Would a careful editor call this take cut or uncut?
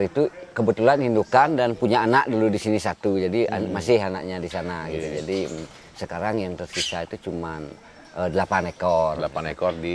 uncut